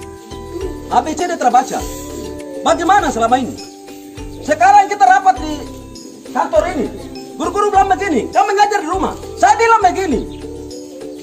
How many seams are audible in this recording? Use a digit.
1